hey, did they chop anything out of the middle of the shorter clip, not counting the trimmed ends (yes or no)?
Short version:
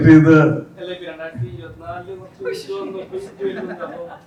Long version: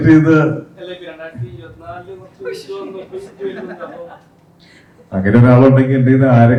no